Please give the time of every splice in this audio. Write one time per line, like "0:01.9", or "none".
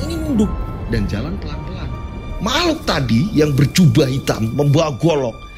0:02.3

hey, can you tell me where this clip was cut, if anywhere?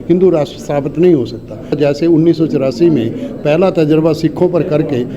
0:01.8

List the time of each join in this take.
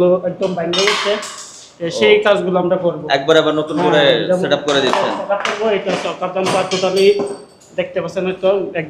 none

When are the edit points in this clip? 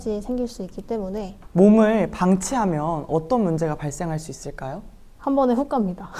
0:01.4

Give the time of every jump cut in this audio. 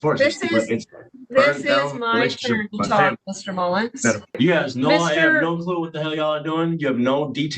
0:04.4

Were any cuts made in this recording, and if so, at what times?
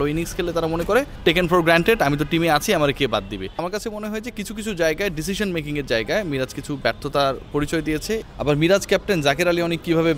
0:01.1
0:03.6
0:08.2

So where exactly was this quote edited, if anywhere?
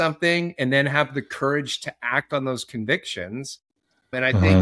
none

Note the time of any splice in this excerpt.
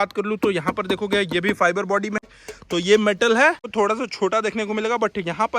0:02.2
0:03.6

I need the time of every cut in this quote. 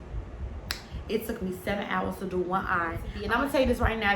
0:03.1

